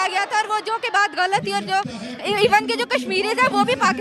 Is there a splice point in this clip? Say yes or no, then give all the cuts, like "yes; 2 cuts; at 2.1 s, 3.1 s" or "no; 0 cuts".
no; 0 cuts